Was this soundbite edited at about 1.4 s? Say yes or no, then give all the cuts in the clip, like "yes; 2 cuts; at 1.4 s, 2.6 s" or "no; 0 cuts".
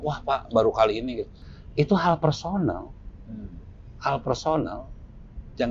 yes; 1 cut; at 1.4 s